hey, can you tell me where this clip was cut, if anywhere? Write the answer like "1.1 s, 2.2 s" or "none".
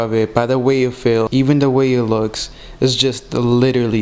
1.3 s